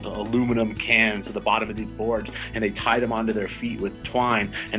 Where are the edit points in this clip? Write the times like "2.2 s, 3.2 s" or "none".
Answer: 1.3 s